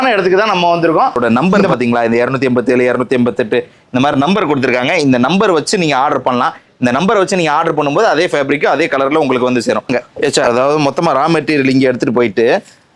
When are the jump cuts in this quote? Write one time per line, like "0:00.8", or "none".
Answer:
0:01.2
0:10.4